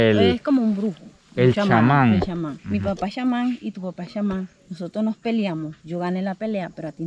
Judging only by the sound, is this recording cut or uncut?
uncut